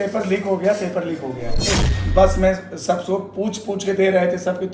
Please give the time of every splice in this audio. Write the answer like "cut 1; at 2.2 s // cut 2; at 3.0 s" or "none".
cut 1; at 1.8 s

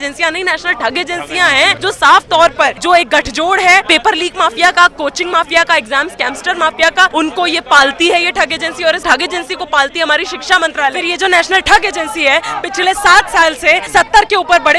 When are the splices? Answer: cut 1; at 1.8 s // cut 2; at 2.8 s // cut 3; at 3.9 s // cut 4; at 7.1 s // cut 5; at 9.0 s // cut 6; at 11.1 s // cut 7; at 13.8 s

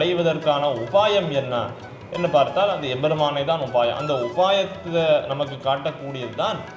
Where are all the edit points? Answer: none

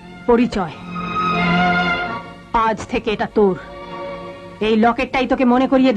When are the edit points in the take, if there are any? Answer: none

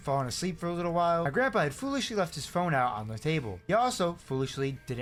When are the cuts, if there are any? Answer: none

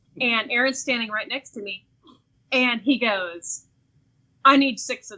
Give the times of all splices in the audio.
none

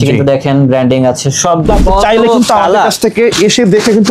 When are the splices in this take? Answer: cut 1; at 1.7 s

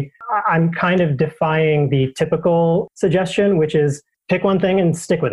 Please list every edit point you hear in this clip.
cut 1; at 4.1 s

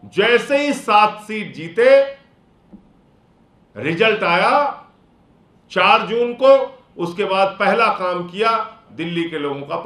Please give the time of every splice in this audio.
none

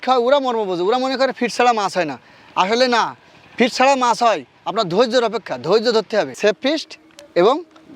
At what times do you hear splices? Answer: cut 1; at 6.3 s

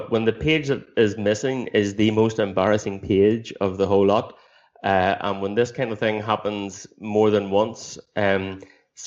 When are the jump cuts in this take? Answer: none

